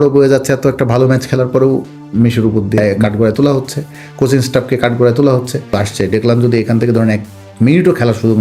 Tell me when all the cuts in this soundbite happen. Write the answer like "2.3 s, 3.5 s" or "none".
2.8 s, 5.8 s